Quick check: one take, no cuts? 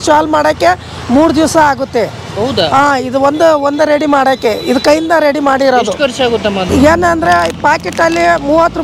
no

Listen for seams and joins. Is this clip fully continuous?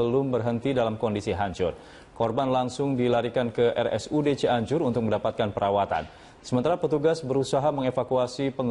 yes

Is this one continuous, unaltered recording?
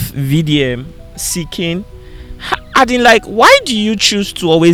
yes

